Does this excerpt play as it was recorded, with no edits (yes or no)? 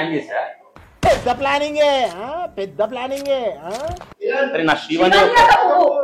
yes